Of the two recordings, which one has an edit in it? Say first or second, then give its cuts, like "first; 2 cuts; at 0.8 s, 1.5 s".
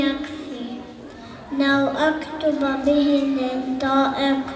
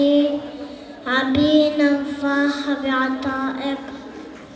second; 1 cut; at 2.7 s